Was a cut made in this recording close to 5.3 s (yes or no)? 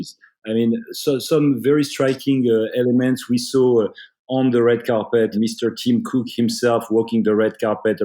yes